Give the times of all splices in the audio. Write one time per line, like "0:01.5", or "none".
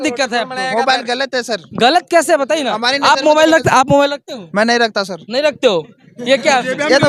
none